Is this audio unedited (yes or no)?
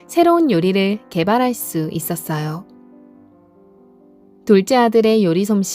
no